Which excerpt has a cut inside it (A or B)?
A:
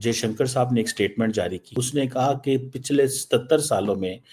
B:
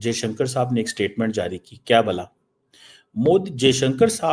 A